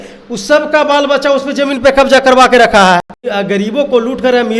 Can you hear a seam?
yes; 1 cut; at 3.2 s

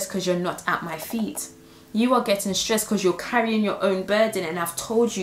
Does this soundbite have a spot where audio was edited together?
no; 0 cuts

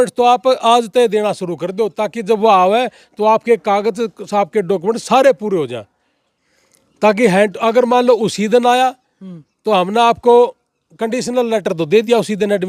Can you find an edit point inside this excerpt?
no; 0 cuts

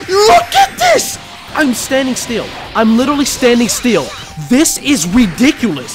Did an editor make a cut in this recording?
no; 0 cuts

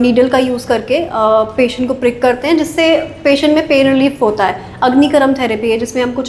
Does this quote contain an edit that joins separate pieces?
no; 0 cuts

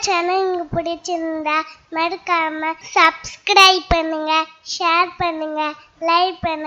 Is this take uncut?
no; 1 cut; at 2.8 s

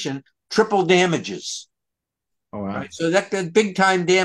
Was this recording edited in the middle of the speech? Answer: no; 0 cuts

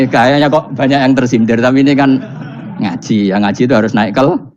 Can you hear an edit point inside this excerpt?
no; 0 cuts

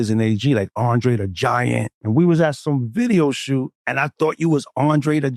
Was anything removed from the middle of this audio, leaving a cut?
yes; 3 cuts; at 1.9 s, 2.6 s, 3.8 s

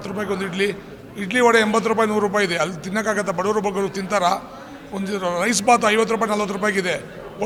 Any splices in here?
no; 0 cuts

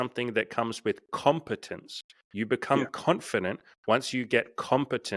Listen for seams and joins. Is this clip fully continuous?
yes; 0 cuts

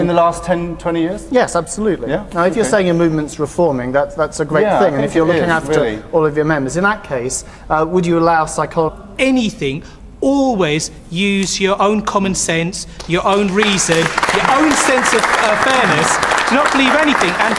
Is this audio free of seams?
yes; 0 cuts

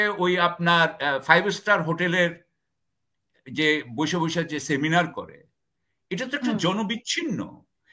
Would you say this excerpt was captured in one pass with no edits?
yes; 0 cuts

